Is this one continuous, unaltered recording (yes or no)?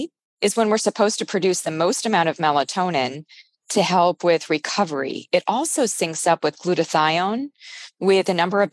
yes